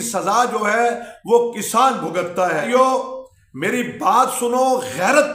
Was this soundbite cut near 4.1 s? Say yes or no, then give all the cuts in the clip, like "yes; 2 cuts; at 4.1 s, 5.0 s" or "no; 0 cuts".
no; 1 cut; at 2.6 s